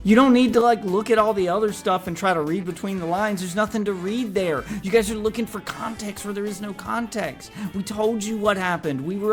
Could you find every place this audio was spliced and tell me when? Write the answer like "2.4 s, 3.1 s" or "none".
none